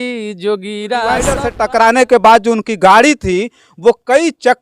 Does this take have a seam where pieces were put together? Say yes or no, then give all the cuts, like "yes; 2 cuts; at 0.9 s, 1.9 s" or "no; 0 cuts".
yes; 1 cut; at 1.4 s